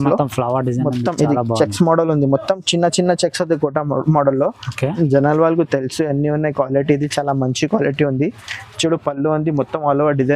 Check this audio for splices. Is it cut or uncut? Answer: uncut